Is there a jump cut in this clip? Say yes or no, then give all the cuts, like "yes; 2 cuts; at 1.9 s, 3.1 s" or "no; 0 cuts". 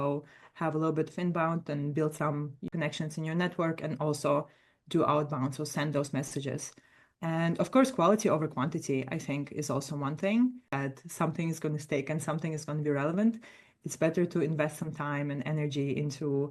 yes; 2 cuts; at 2.7 s, 10.7 s